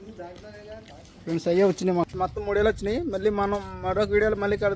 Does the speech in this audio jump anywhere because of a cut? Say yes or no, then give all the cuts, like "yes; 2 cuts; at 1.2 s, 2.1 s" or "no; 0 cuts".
yes; 1 cut; at 2.1 s